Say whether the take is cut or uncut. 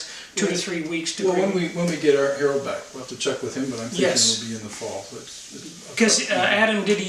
cut